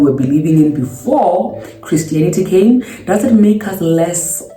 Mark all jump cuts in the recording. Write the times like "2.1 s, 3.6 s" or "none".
none

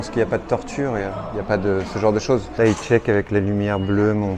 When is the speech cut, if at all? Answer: 2.5 s

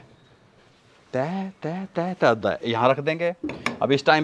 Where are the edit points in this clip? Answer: none

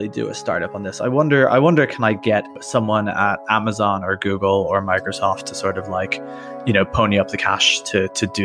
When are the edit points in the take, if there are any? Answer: none

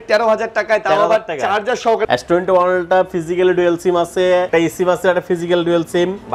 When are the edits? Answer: 2.0 s, 4.5 s

